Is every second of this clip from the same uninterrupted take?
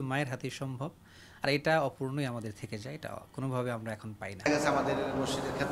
yes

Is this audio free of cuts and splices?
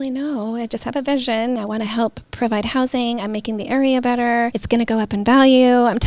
no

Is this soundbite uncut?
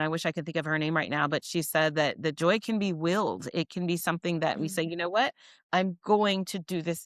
yes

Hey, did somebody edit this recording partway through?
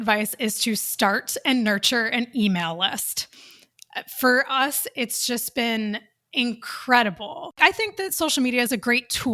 yes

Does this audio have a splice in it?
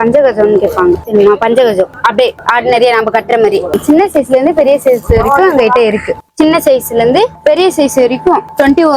yes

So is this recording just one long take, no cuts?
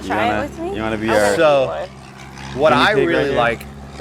yes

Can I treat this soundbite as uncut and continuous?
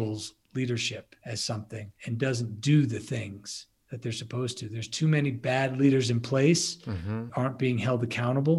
no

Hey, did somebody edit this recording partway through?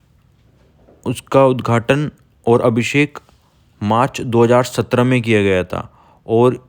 no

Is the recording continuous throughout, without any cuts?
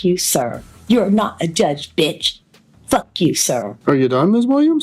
no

